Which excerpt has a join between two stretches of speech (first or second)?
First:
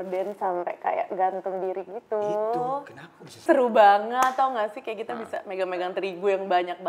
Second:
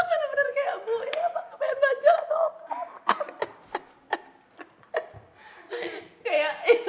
first